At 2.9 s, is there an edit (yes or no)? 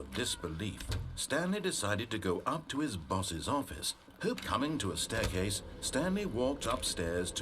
no